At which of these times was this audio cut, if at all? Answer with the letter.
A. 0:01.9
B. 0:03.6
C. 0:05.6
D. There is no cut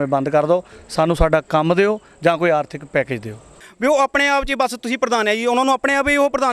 B